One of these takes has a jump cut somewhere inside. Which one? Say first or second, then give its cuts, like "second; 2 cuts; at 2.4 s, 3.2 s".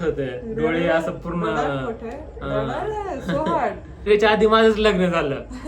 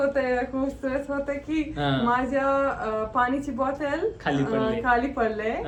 first; 1 cut; at 4.1 s